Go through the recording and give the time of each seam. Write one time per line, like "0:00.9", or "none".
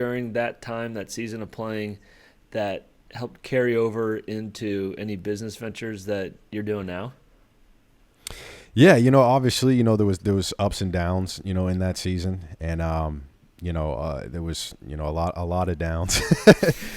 none

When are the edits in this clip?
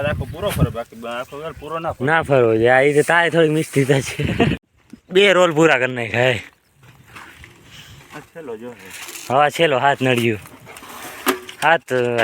0:04.6

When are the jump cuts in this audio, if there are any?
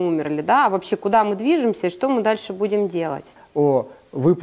0:03.4

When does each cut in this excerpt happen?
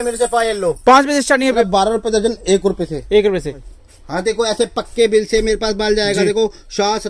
0:01.7
0:03.6

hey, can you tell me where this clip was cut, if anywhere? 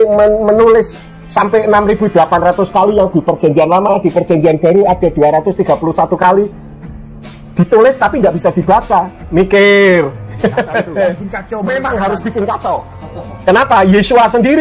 0:11.3

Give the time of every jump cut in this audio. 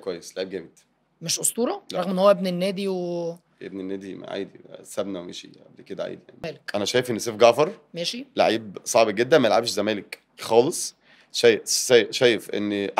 0:06.6

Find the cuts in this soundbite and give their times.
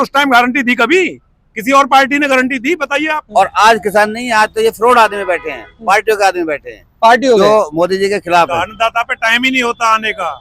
0:03.2
0:08.5

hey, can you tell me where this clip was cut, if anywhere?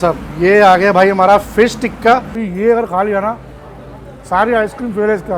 0:02.4

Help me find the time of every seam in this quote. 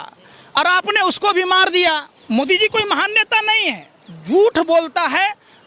0:02.1

